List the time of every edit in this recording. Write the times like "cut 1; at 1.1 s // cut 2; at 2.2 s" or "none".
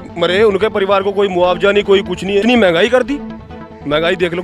cut 1; at 2.4 s